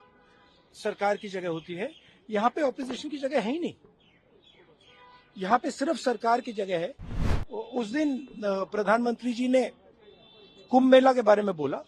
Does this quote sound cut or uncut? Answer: cut